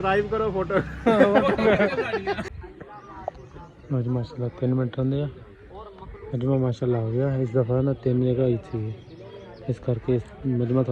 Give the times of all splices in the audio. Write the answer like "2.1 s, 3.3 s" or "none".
2.6 s